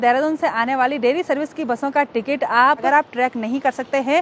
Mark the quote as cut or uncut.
cut